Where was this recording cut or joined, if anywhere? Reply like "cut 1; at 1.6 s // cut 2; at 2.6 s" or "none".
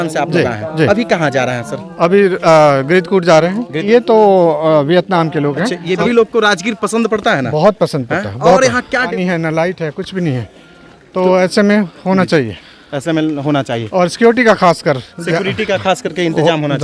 cut 1; at 3.8 s // cut 2; at 6.0 s // cut 3; at 9.1 s